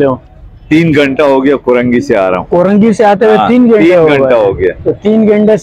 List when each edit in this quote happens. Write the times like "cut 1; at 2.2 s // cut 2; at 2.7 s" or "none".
none